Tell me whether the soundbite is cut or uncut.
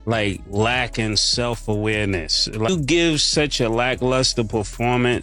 cut